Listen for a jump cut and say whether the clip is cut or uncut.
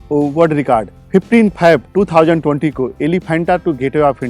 uncut